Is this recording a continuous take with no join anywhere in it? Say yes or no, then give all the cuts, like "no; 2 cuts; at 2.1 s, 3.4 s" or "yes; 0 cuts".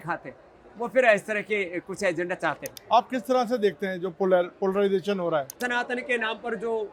no; 2 cuts; at 2.7 s, 5.6 s